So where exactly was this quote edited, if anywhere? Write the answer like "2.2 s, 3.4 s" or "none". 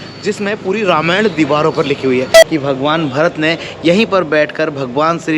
2.4 s